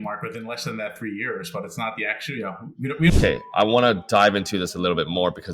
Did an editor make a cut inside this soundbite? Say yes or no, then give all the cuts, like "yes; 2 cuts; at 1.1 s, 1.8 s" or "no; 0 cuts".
yes; 1 cut; at 3.1 s